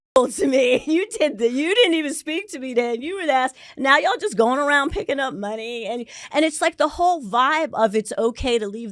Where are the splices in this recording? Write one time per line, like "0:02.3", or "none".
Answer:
none